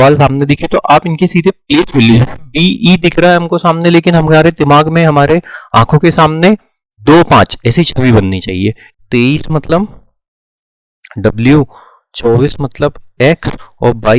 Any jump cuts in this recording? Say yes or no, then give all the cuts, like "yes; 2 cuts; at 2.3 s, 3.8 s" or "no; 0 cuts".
yes; 1 cut; at 8.8 s